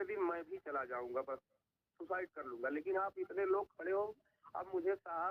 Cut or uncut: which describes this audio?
uncut